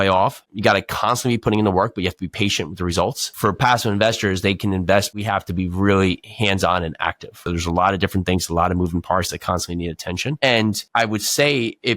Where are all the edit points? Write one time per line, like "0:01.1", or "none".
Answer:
0:03.2
0:05.2
0:07.4
0:10.8

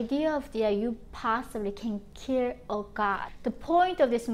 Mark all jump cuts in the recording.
0:03.3

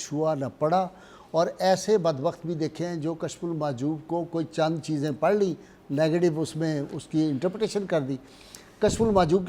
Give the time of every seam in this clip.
none

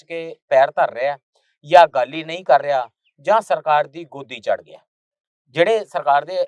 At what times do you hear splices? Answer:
none

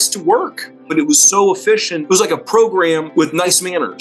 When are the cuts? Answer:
0:00.9
0:01.9
0:03.1

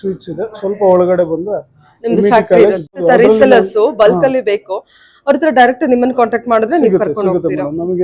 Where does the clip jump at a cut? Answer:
0:03.0

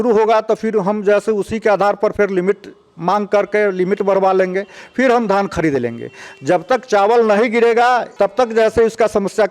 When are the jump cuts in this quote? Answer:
0:08.1

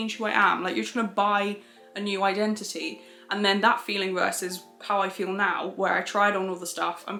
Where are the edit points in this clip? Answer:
none

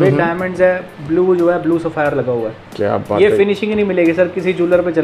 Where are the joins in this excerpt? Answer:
none

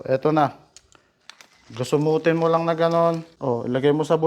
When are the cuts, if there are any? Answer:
0:03.3

